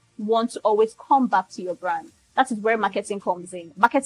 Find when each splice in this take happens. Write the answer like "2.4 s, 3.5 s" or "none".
none

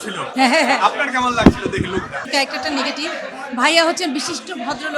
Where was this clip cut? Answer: 2.2 s

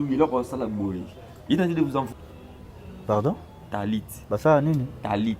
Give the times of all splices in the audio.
2.1 s

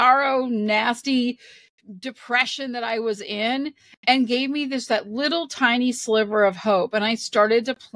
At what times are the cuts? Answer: none

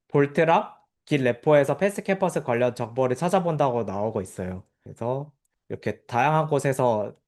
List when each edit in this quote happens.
none

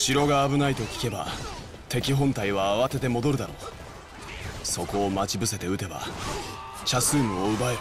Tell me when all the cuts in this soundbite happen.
none

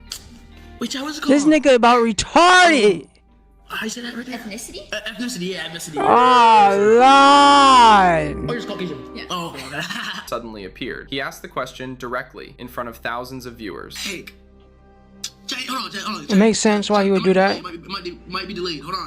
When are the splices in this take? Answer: 10.2 s

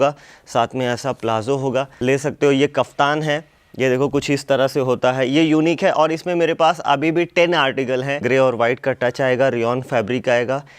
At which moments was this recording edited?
1.9 s, 8.2 s

